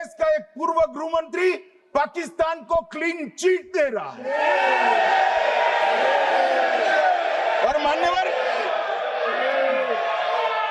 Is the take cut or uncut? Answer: uncut